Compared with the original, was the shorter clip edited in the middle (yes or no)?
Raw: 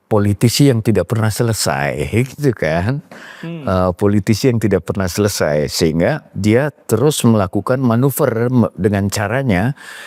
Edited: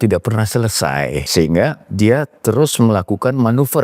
yes